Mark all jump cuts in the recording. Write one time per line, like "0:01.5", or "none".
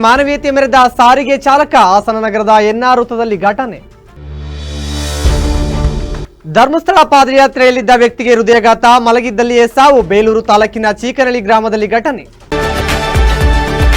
0:12.4